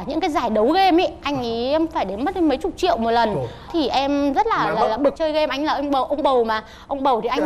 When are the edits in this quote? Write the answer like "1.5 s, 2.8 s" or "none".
5.2 s